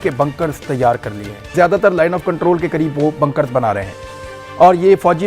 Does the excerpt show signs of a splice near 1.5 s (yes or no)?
yes